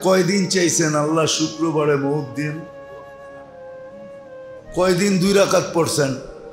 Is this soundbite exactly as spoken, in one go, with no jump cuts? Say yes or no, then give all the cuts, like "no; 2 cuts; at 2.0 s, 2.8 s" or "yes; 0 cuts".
no; 2 cuts; at 2.6 s, 4.7 s